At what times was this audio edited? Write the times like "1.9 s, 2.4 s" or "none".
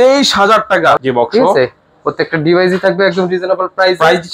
1.0 s